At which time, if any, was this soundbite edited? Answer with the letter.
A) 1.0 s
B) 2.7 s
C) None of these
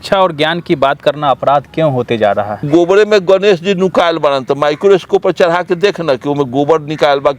B